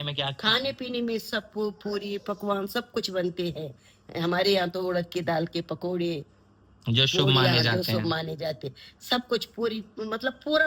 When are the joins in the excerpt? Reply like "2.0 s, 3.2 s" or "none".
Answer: none